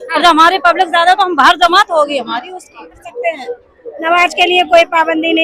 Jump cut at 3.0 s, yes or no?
yes